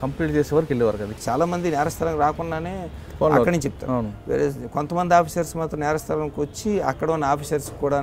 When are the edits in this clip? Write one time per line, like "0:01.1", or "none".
0:01.1